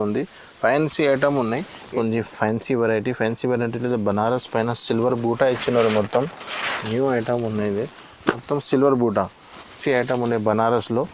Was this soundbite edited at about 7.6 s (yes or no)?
no